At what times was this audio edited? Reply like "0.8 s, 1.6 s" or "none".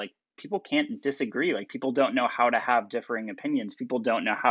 none